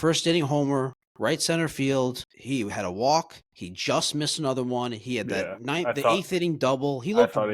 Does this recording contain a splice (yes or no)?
yes